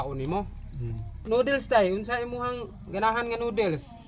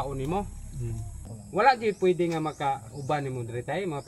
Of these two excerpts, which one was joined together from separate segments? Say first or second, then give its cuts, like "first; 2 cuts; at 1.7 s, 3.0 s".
second; 1 cut; at 1.2 s